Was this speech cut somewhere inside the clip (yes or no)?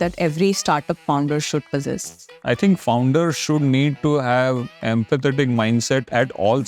yes